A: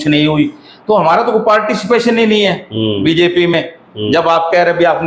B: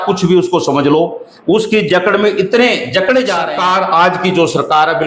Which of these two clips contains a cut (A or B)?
B